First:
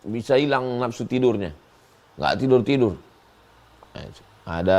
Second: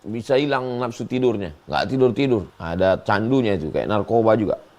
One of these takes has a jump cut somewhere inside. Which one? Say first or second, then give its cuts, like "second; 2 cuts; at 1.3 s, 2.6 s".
second; 2 cuts; at 1.5 s, 2.6 s